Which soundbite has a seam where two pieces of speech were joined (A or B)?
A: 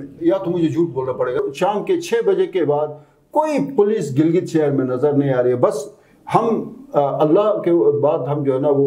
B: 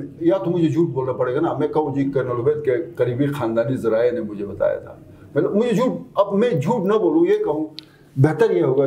A